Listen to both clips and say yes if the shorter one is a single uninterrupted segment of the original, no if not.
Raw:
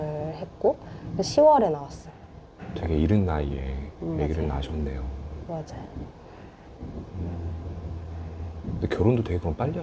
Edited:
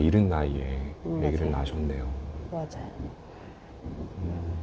yes